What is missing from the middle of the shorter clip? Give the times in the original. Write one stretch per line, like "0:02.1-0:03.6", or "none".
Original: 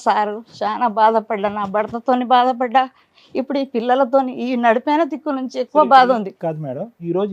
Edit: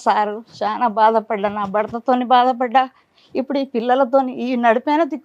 none